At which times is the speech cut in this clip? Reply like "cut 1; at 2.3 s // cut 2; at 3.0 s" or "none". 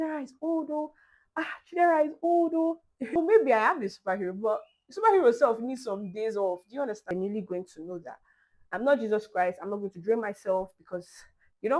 cut 1; at 3.2 s // cut 2; at 7.1 s